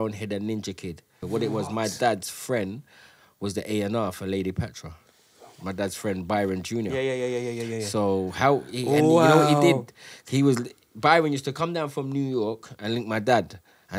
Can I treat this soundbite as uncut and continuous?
no; 1 cut; at 1.1 s

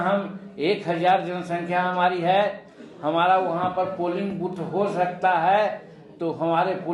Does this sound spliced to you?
no; 0 cuts

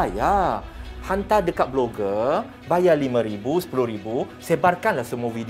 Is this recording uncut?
yes; 0 cuts

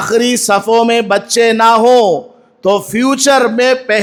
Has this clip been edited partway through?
no; 0 cuts

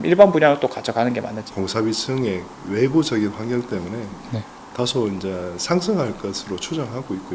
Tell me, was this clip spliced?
yes; 1 cut; at 1.3 s

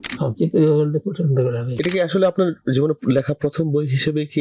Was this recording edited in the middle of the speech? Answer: yes; 1 cut; at 1.7 s

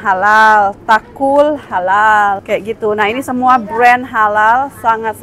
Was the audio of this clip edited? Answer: yes; 1 cut; at 2.4 s

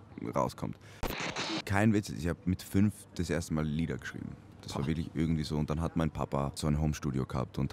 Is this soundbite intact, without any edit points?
no; 2 cuts; at 1.2 s, 6.6 s

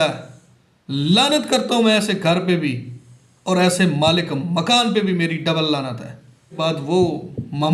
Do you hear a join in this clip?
yes; 1 cut; at 6.6 s

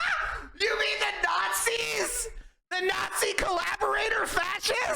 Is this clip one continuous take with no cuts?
yes; 0 cuts

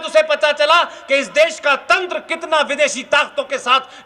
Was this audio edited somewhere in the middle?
no; 0 cuts

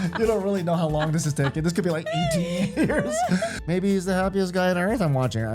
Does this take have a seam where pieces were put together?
yes; 1 cut; at 3.5 s

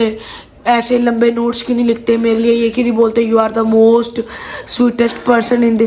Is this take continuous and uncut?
yes; 0 cuts

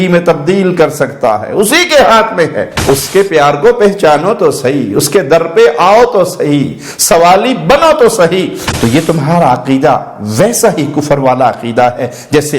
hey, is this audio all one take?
no; 2 cuts; at 2.7 s, 8.6 s

